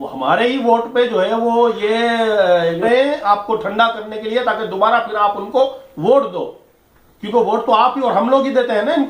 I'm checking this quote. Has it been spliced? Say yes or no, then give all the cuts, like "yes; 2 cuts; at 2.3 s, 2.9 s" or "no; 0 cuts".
no; 0 cuts